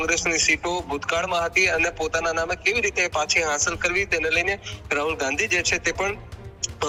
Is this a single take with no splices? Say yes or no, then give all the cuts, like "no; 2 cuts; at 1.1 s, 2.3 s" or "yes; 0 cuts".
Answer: yes; 0 cuts